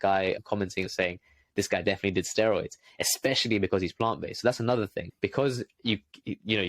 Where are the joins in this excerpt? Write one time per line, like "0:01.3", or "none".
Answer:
0:00.9